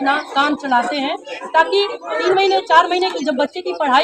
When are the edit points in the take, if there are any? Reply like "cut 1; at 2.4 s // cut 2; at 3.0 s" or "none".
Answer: none